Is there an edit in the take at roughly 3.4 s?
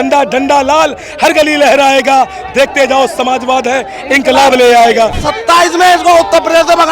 no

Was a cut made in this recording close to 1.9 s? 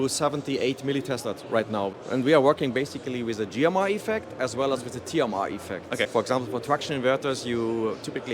yes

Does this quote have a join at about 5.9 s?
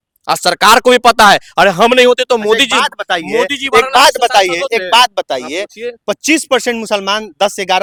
no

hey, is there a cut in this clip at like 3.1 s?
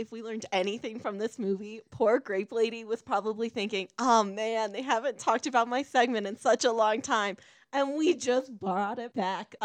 no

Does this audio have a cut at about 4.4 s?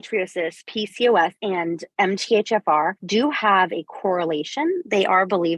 no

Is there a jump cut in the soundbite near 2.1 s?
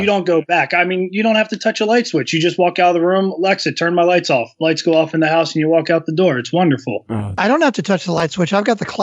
no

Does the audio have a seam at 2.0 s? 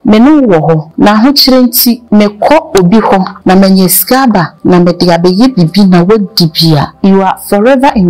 yes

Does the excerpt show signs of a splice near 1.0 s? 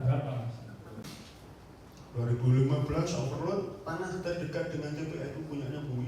yes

